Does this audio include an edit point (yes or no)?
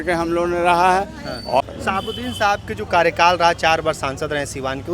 yes